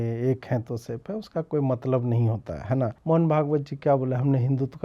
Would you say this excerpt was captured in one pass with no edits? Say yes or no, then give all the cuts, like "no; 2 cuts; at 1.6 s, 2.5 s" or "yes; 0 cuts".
no; 1 cut; at 3.0 s